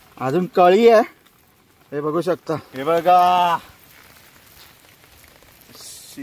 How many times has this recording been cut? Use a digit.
1